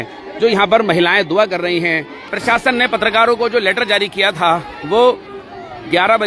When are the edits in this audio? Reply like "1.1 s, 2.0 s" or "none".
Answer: 2.1 s